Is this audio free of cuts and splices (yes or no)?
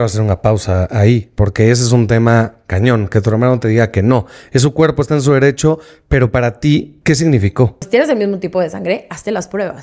no